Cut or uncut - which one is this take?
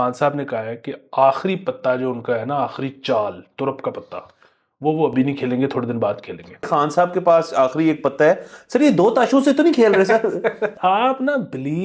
cut